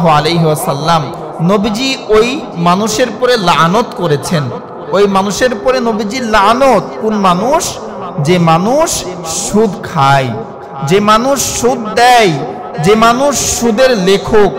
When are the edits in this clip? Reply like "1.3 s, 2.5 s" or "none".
none